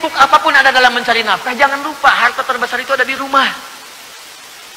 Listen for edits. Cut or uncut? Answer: uncut